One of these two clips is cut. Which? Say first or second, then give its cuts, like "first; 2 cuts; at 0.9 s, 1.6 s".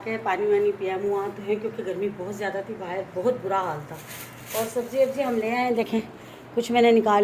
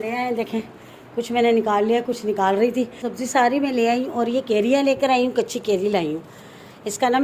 second; 1 cut; at 3.0 s